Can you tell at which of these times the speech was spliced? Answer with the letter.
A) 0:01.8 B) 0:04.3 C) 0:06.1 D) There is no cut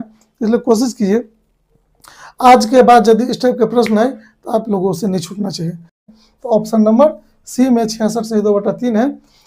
C